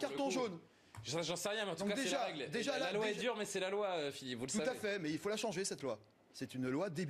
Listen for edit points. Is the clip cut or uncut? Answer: uncut